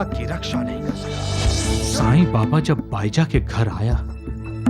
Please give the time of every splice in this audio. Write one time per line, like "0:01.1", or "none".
0:01.6